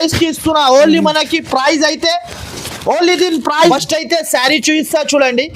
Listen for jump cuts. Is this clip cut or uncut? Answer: cut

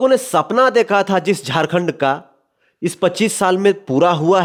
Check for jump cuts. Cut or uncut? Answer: uncut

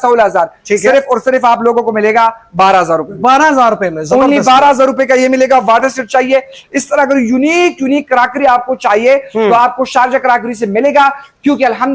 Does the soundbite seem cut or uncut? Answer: uncut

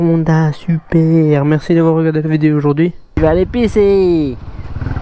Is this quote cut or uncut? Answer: cut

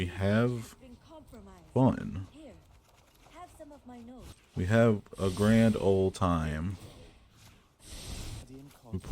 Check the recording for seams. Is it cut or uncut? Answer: cut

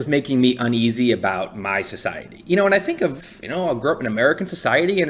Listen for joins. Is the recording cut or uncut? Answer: uncut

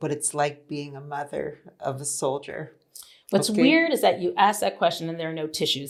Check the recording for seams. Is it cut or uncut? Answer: uncut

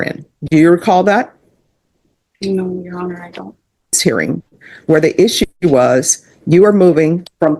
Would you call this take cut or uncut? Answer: cut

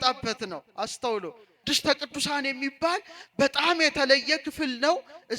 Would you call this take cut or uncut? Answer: cut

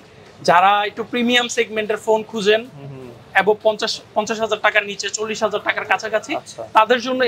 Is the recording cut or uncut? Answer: uncut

